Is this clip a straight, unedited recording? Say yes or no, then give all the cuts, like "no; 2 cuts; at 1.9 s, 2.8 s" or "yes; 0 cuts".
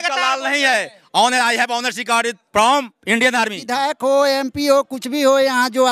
no; 1 cut; at 3.7 s